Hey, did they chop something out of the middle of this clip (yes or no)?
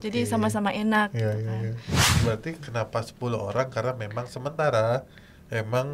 yes